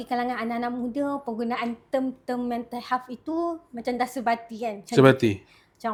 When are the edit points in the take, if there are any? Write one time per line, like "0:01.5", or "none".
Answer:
none